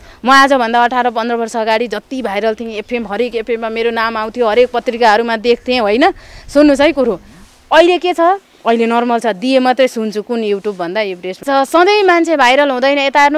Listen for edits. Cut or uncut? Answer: cut